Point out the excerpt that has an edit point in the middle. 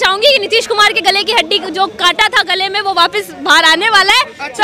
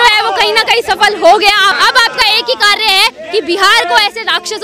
second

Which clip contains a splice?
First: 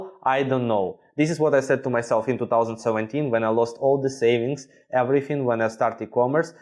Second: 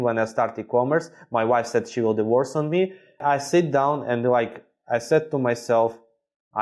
second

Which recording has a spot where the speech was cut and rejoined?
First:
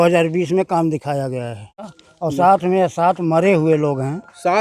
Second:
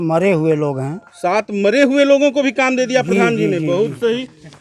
first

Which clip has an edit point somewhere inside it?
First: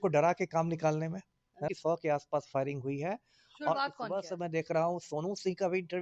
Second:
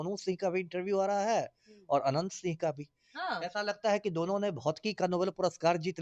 first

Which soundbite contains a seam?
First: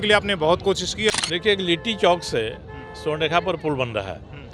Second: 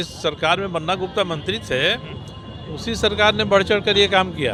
first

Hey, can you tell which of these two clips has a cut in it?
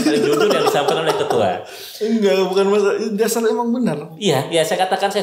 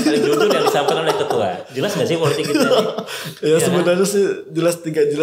second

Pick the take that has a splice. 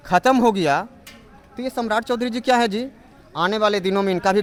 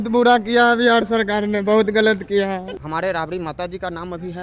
second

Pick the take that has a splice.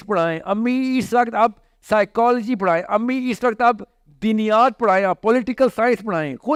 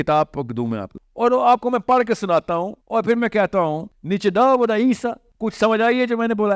second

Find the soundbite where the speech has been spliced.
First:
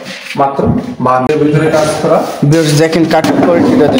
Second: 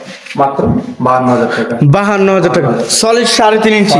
first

